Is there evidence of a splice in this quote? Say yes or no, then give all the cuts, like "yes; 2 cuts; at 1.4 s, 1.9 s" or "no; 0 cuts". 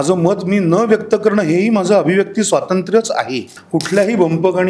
yes; 1 cut; at 3.5 s